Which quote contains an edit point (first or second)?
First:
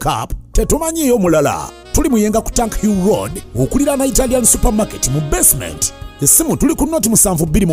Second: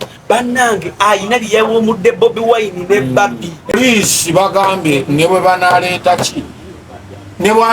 second